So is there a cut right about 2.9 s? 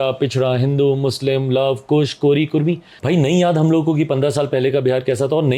yes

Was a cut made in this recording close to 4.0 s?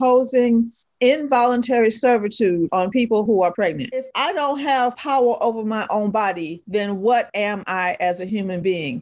yes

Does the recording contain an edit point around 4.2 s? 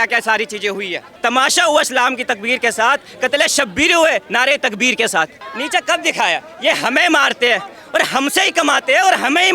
no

